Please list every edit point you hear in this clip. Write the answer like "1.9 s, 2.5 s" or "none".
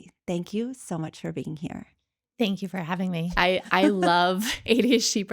3.3 s